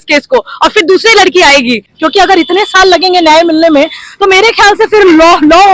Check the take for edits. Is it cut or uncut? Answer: cut